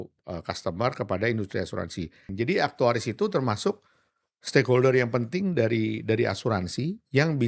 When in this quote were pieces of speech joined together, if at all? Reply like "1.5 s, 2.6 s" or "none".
2.3 s